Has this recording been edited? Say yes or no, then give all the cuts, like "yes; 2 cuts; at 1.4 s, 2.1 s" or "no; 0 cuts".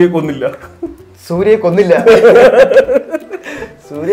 no; 0 cuts